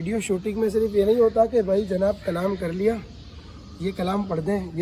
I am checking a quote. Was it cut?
no; 0 cuts

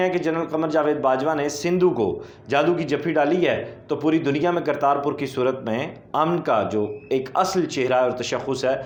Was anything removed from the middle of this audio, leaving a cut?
no; 0 cuts

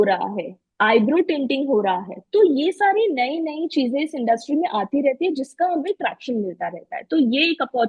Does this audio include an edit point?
no; 0 cuts

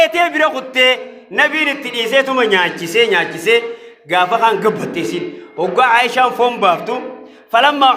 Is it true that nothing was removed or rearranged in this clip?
yes; 0 cuts

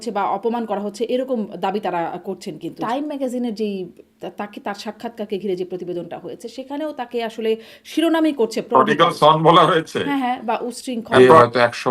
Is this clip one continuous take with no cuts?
no; 2 cuts; at 2.8 s, 11.2 s

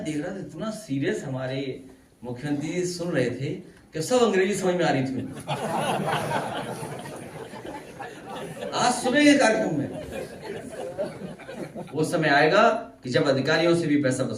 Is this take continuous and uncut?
no; 1 cut; at 11.9 s

